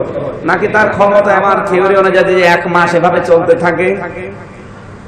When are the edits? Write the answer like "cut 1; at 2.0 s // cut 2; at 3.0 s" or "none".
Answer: cut 1; at 1.6 s